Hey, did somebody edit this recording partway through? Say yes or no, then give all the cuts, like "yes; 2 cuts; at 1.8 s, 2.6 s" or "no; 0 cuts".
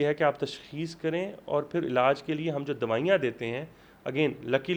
no; 0 cuts